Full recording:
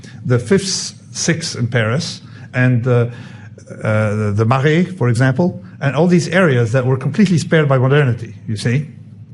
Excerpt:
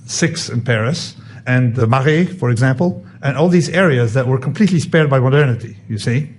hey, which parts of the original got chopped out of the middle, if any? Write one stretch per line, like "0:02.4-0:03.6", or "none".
0:02.6-0:04.1